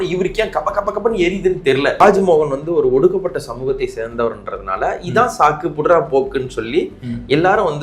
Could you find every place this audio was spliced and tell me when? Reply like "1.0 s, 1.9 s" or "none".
2.0 s

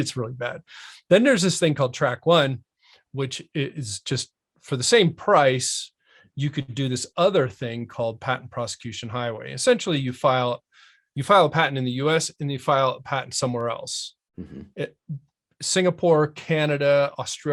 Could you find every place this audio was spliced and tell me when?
none

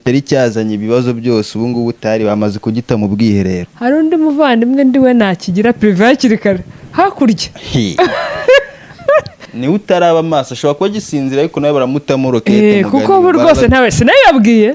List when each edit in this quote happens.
3.7 s, 9.4 s

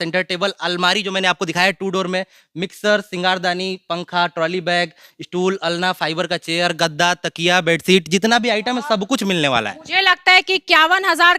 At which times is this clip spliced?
none

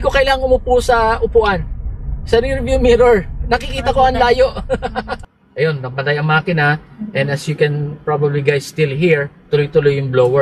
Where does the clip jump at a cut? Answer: 5.1 s

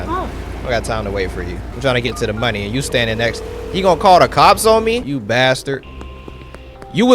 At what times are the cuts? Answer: 1.7 s, 5.1 s

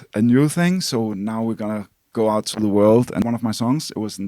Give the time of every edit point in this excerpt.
3.2 s

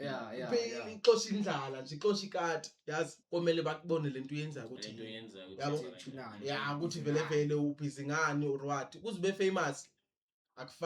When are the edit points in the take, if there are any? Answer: 3.2 s

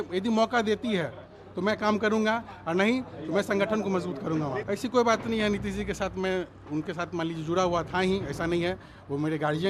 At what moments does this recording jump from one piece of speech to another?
4.6 s

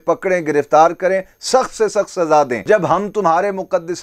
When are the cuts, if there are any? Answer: 2.6 s

